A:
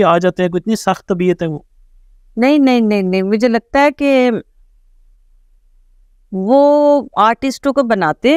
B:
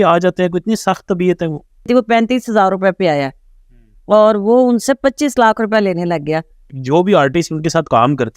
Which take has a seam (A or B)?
B